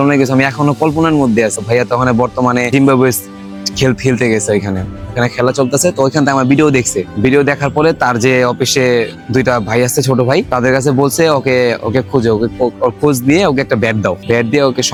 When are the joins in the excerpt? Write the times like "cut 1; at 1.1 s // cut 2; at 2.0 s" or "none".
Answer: none

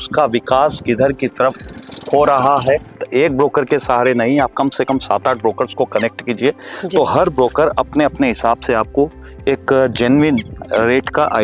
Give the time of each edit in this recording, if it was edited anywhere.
cut 1; at 3.0 s

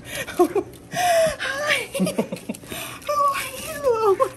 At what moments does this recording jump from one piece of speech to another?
none

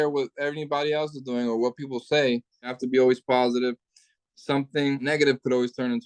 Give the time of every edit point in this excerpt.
cut 1; at 2.8 s // cut 2; at 5.1 s

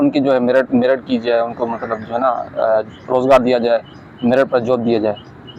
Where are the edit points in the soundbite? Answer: none

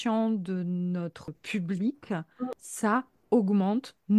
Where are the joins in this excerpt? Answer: cut 1; at 1.4 s // cut 2; at 2.6 s

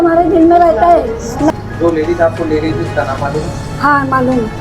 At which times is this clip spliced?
cut 1; at 1.5 s

